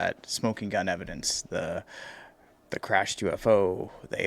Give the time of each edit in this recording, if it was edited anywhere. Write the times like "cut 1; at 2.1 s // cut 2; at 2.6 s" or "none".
none